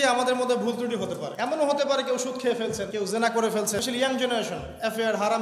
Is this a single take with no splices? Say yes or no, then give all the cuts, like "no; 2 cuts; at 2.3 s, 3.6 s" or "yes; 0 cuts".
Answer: no; 3 cuts; at 1.3 s, 2.9 s, 3.8 s